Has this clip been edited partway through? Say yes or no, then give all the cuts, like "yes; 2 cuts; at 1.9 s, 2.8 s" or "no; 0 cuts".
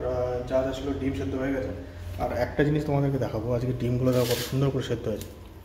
no; 0 cuts